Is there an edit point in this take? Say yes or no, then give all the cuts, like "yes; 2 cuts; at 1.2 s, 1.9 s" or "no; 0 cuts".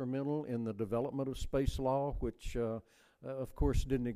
no; 0 cuts